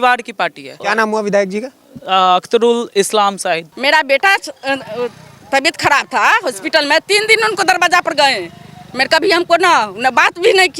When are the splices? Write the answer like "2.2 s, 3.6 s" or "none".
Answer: 0.8 s, 3.7 s